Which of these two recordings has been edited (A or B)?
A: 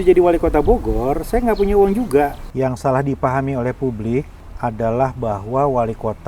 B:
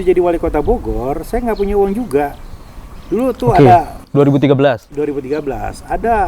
A